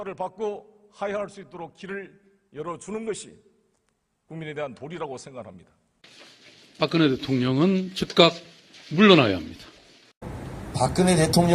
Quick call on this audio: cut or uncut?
uncut